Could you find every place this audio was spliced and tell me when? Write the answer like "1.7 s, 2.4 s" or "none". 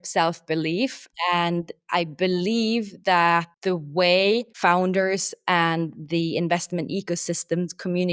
1.1 s, 3.5 s, 4.5 s